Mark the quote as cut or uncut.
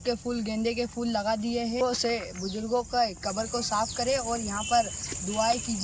cut